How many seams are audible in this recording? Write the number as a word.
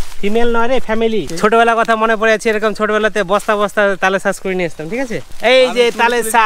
two